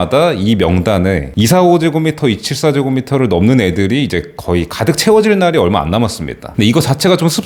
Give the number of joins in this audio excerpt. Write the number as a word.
zero